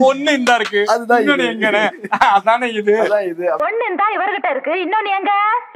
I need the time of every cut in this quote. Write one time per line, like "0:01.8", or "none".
0:03.6